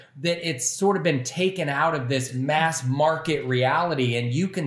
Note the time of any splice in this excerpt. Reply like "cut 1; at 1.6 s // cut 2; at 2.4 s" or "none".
cut 1; at 2.3 s